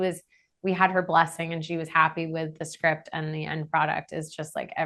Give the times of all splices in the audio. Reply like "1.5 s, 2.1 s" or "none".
none